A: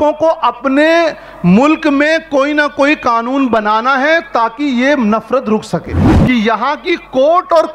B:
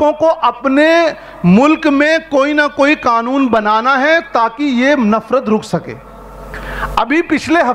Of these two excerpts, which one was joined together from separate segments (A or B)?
A